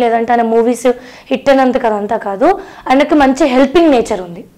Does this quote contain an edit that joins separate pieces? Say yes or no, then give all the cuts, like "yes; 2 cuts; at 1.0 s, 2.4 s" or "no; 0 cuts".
no; 0 cuts